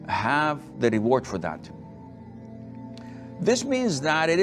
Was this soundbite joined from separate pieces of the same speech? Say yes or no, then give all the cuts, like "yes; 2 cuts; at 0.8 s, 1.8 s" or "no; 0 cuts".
yes; 2 cuts; at 2.0 s, 3.4 s